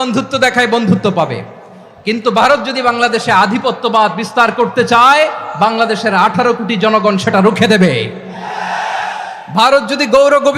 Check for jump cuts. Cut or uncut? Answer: uncut